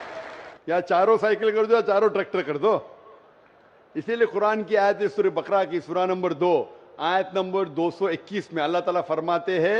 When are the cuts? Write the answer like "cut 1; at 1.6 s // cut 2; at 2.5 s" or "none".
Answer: cut 1; at 7.9 s